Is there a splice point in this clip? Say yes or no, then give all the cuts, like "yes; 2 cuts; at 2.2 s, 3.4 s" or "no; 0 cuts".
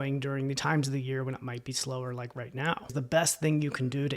yes; 1 cut; at 2.9 s